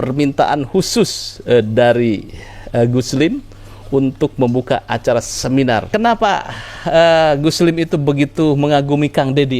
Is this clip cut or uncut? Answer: cut